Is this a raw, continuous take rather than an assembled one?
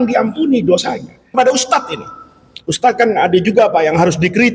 no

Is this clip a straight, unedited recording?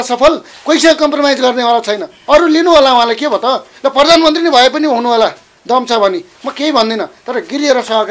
no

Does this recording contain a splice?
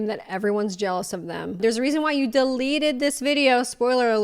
yes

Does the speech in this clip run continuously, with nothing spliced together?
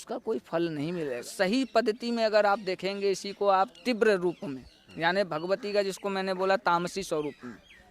no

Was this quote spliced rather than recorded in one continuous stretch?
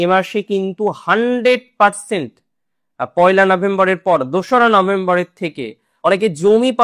yes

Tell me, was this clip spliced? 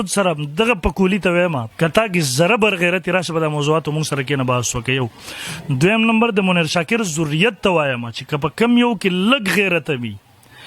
yes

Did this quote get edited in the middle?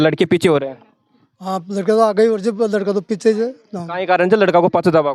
no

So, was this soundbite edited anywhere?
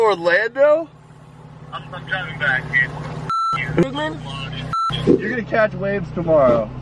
yes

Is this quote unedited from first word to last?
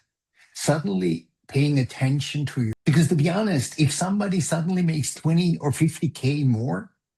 no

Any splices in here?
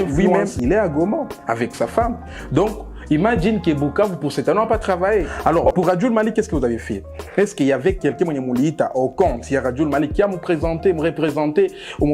yes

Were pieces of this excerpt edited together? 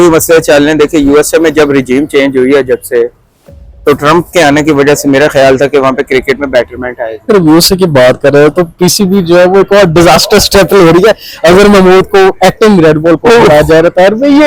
yes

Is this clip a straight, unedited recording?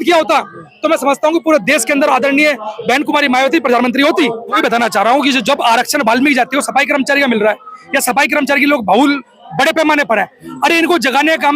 no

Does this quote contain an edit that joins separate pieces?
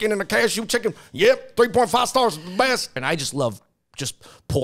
yes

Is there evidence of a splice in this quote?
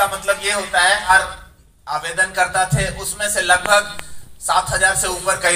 yes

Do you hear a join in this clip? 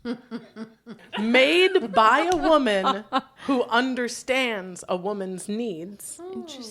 yes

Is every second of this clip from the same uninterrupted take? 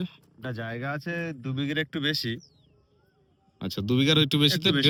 yes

